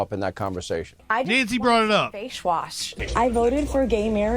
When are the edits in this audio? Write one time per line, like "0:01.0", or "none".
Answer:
0:01.0
0:02.9